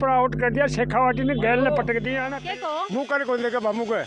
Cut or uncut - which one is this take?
cut